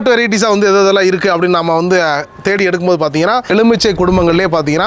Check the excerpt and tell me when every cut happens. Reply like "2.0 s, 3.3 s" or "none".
3.6 s